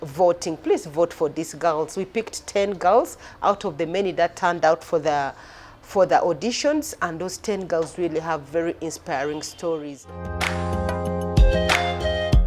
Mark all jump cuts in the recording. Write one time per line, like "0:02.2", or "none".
0:10.2